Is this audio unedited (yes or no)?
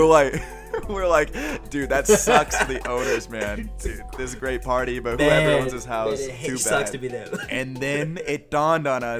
yes